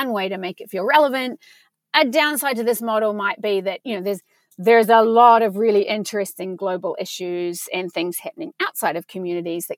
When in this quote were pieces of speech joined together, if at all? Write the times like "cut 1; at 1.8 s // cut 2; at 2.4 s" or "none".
none